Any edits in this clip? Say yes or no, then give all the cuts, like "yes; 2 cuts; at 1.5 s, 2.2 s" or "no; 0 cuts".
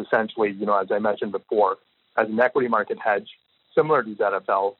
yes; 1 cut; at 3.7 s